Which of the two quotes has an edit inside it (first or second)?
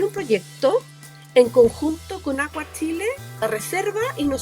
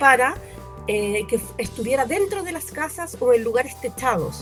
first